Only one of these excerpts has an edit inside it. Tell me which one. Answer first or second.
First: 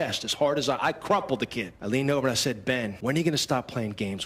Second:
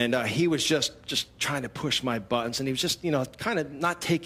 first